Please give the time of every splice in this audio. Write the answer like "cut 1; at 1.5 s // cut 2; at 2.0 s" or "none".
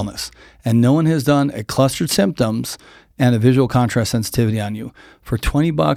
none